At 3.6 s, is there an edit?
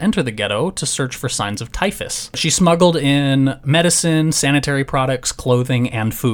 no; 1 cut; at 2.4 s

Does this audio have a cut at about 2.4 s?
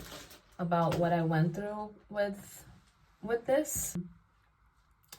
no; 1 cut; at 4.1 s

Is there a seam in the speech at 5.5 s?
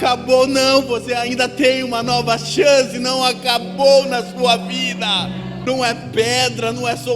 yes; 1 cut; at 5.5 s

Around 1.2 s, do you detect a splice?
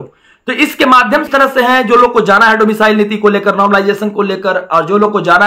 yes; 1 cut; at 1.2 s

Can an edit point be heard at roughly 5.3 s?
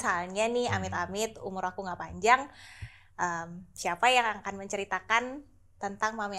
no; 0 cuts

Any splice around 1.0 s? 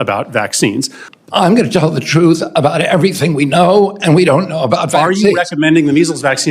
yes; 1 cut; at 1.0 s

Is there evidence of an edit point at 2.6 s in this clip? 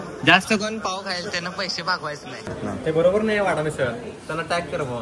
yes; 1 cut; at 2.6 s

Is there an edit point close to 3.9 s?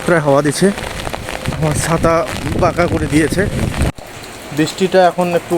yes; 1 cut; at 3.9 s

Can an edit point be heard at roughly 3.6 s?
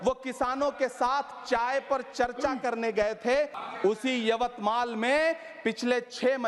yes; 1 cut; at 3.6 s

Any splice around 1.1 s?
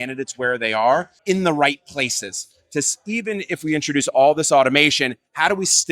yes; 1 cut; at 1.1 s

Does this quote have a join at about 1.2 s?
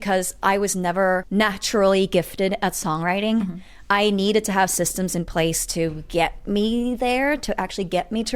yes; 1 cut; at 1.2 s

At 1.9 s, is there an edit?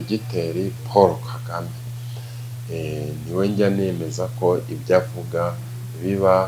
no; 0 cuts

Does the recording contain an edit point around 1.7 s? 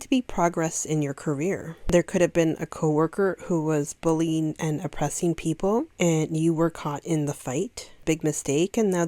yes; 3 cuts; at 1.7 s, 5.9 s, 8.0 s

